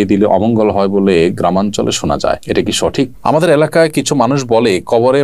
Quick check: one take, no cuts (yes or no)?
no